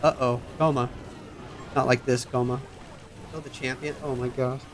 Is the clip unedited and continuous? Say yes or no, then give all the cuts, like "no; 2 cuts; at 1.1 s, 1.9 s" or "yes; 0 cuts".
yes; 0 cuts